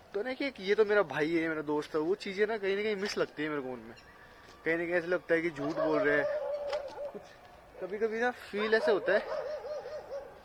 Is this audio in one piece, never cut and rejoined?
yes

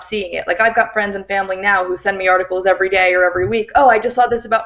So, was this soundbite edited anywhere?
no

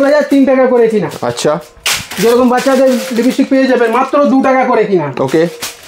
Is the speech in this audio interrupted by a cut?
no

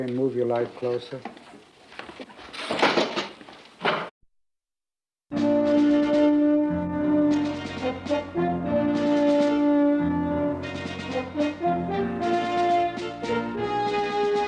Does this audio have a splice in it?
no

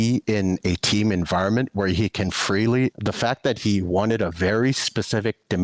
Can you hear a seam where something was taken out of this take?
yes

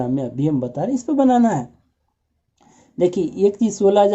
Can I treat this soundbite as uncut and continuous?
yes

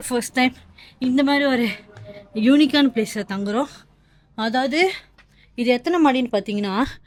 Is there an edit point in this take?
no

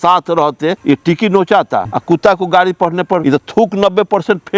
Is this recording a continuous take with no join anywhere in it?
no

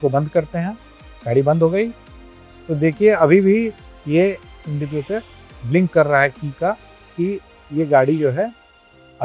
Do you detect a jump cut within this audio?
no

